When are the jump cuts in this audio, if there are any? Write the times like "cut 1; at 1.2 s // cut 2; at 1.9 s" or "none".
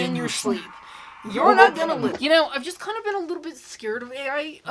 none